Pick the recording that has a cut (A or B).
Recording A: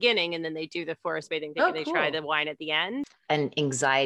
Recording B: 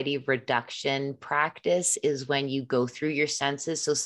A